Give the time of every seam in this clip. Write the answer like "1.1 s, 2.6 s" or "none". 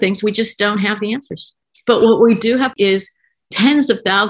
2.7 s